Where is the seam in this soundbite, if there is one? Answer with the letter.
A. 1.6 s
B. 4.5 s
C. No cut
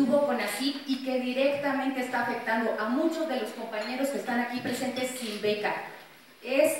B